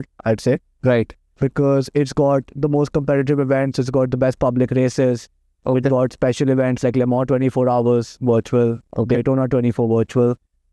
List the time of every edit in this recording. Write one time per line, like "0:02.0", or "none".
none